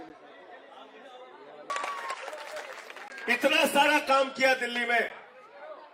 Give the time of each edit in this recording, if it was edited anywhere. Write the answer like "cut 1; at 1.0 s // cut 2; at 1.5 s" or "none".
cut 1; at 1.7 s